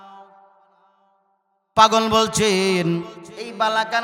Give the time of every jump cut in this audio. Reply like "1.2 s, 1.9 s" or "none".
none